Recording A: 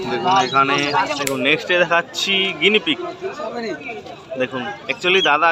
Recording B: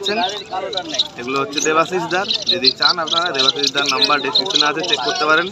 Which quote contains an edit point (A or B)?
A